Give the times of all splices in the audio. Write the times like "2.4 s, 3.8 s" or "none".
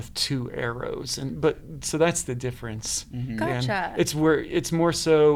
none